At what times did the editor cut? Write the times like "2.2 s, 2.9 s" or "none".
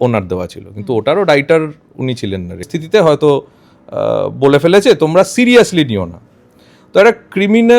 2.7 s